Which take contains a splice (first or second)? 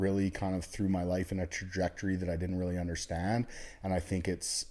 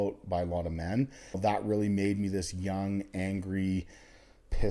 second